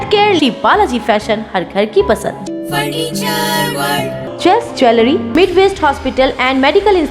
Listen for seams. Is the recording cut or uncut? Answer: uncut